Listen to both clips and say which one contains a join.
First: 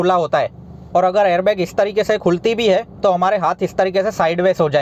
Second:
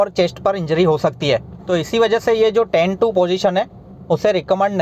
second; 1 cut; at 1.5 s

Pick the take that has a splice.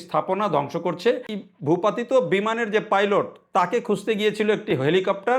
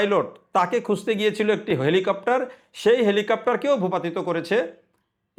first; 1 cut; at 1.3 s

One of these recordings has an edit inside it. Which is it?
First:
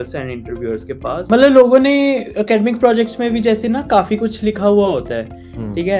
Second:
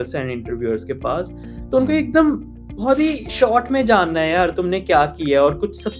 first; 1 cut; at 1.2 s

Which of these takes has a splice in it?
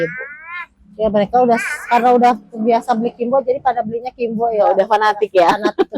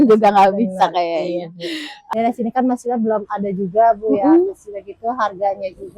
second; 1 cut; at 1.9 s

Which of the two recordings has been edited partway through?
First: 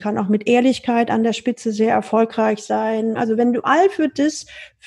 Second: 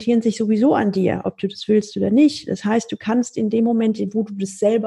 first; 1 cut; at 3.2 s

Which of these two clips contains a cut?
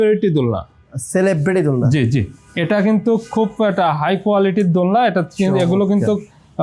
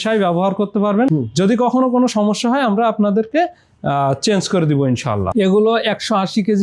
second; 2 cuts; at 1.1 s, 5.4 s

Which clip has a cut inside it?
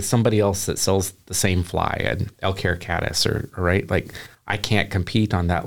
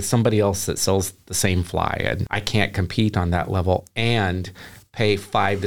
second; 1 cut; at 2.3 s

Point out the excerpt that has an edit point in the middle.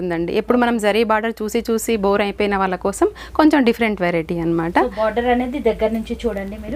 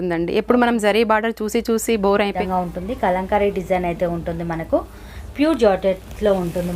second; 1 cut; at 2.4 s

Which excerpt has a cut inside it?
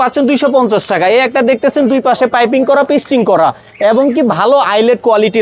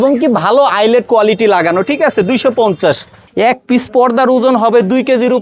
second; 1 cut; at 3.2 s

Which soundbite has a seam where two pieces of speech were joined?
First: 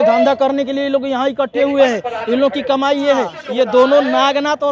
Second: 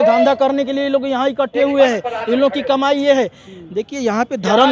first; 1 cut; at 3.4 s

